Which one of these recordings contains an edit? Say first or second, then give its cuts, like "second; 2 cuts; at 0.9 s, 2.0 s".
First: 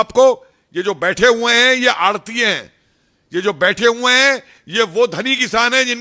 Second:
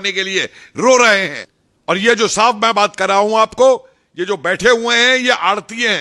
second; 1 cut; at 1.3 s